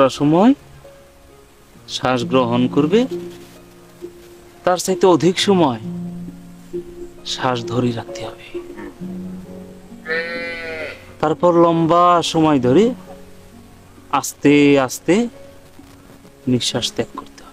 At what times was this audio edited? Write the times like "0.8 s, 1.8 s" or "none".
none